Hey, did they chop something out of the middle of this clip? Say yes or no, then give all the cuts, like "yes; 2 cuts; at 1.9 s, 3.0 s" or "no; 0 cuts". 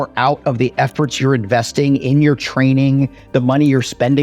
no; 0 cuts